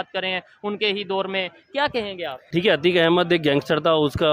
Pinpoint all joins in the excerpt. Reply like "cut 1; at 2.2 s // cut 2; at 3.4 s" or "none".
cut 1; at 2.4 s